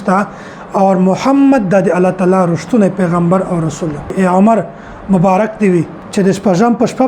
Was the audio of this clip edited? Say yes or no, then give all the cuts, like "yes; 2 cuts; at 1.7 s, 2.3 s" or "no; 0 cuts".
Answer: yes; 2 cuts; at 4.1 s, 6.0 s